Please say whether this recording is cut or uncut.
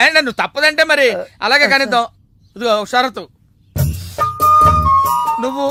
uncut